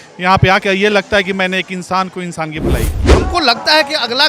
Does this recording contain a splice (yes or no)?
yes